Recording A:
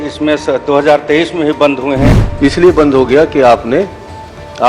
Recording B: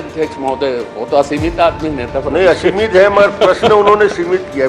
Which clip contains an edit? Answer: A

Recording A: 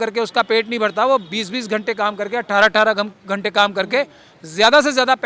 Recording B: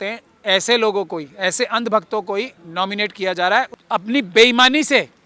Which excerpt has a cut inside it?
B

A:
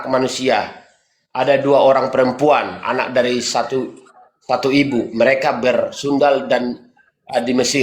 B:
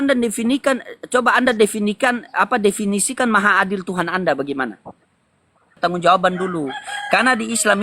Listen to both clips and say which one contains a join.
B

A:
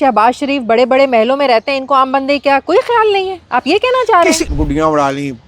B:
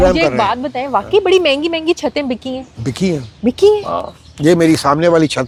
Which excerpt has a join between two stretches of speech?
A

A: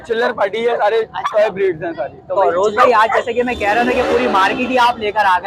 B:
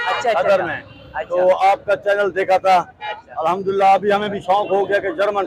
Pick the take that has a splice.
A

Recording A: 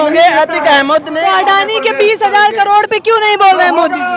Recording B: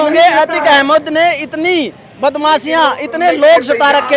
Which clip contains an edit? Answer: A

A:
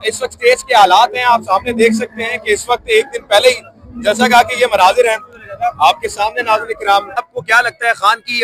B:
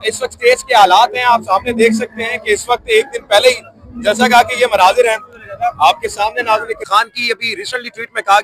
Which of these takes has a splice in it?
B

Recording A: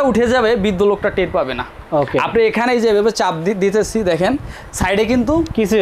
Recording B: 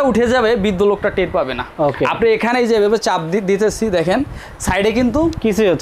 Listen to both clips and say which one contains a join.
B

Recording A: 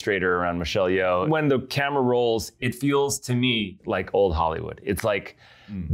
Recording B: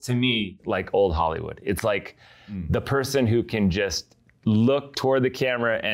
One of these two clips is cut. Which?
A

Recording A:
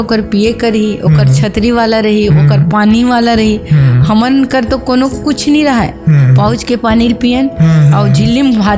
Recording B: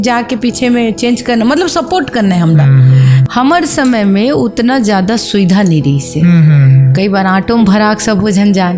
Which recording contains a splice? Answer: B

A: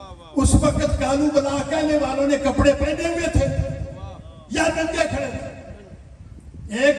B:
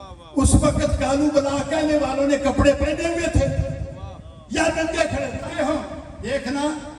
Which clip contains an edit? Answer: B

